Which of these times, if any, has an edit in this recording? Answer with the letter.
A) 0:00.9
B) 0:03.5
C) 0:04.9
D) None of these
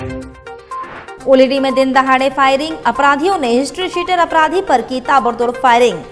A